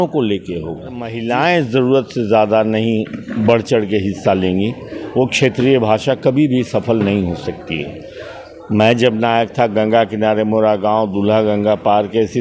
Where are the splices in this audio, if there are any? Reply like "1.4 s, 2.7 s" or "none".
1.1 s